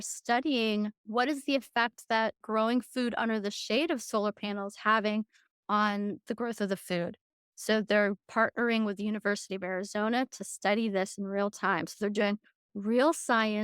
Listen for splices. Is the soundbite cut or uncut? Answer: cut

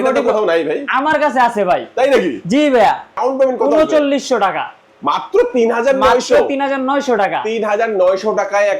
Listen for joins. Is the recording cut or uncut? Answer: cut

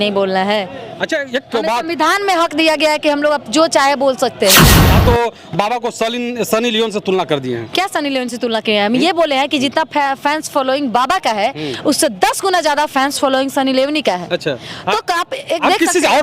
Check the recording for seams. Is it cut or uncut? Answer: cut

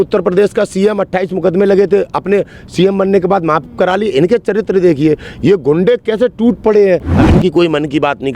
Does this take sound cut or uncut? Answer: cut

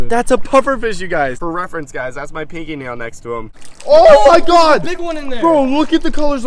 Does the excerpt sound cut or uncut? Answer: cut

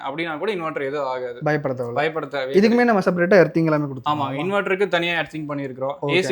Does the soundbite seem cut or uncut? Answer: uncut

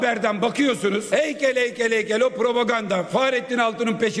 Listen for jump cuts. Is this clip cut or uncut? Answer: cut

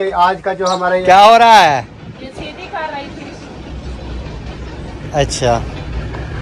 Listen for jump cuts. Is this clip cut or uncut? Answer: cut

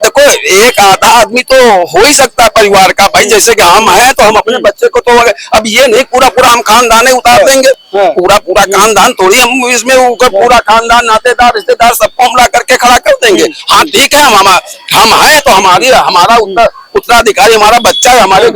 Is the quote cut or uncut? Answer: uncut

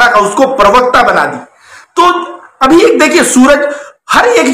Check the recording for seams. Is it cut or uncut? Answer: uncut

